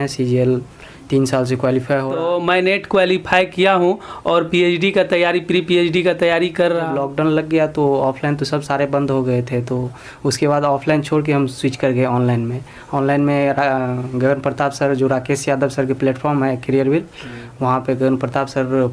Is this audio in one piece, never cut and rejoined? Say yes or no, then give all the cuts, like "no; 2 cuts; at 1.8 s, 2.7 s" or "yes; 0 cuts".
no; 2 cuts; at 2.2 s, 6.9 s